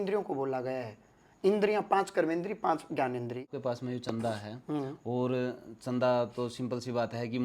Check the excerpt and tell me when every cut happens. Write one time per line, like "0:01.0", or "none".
0:03.5